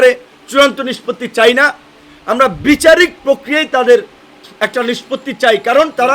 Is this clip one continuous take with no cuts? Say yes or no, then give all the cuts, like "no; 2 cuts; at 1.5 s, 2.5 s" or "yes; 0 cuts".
yes; 0 cuts